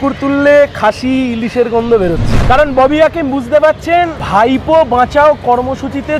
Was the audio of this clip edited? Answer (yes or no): yes